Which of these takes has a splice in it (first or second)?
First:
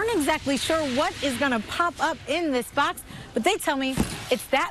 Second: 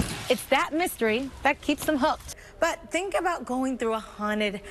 second